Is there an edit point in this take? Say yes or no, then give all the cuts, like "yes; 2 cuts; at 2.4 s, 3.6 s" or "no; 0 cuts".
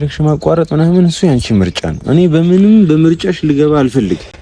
no; 0 cuts